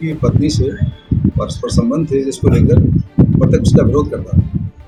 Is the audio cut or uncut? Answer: uncut